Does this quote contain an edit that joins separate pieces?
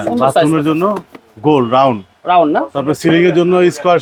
no; 0 cuts

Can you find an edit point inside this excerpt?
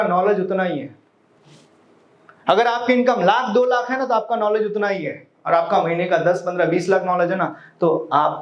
no; 0 cuts

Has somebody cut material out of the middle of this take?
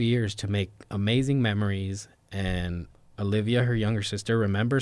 yes; 1 cut; at 2.9 s

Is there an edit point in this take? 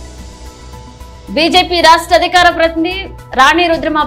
no; 0 cuts

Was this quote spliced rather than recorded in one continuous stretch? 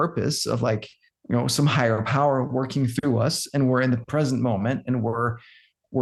no; 0 cuts

